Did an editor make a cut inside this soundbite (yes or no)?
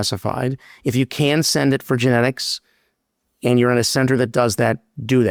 no